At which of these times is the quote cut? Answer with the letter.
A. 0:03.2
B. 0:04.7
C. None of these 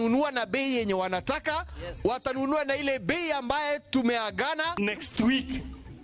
B